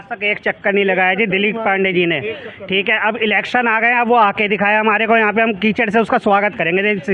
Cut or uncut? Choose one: uncut